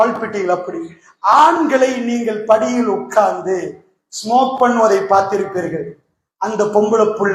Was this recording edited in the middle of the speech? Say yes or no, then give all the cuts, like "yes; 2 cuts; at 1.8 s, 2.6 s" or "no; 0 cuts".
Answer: no; 0 cuts